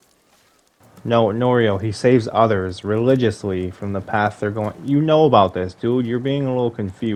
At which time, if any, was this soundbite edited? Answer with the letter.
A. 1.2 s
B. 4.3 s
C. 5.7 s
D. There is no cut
D